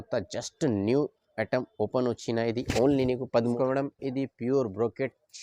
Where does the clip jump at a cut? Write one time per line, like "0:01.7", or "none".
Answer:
0:03.4